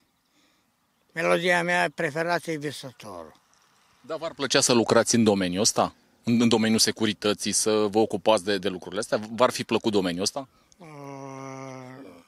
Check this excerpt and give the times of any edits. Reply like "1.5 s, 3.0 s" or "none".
none